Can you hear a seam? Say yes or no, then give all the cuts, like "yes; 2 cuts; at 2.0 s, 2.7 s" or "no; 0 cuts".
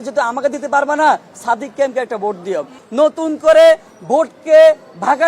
yes; 1 cut; at 2.8 s